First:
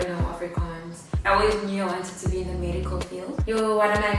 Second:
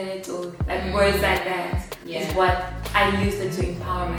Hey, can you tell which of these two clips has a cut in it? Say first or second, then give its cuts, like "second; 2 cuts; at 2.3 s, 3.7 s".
first; 2 cuts; at 1.1 s, 3.4 s